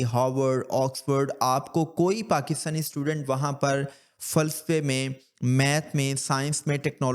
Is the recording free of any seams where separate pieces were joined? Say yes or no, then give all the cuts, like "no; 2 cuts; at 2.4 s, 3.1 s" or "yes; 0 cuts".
yes; 0 cuts